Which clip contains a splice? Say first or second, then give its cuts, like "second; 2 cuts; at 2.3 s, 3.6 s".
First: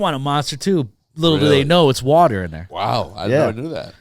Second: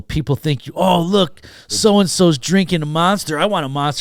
first; 1 cut; at 2.6 s